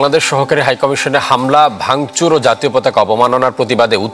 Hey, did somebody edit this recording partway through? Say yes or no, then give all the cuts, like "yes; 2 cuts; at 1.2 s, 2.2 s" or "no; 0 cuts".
no; 0 cuts